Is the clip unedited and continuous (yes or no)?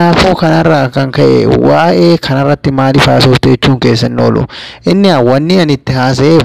yes